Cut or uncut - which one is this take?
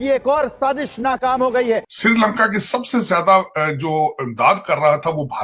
cut